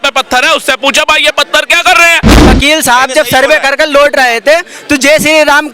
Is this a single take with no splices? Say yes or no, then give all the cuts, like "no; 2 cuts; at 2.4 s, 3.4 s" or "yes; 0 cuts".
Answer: no; 1 cut; at 2.4 s